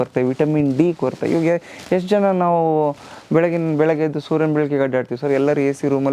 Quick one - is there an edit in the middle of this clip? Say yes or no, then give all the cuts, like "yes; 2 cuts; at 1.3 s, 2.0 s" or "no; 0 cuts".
no; 0 cuts